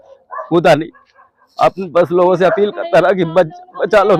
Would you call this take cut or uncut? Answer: uncut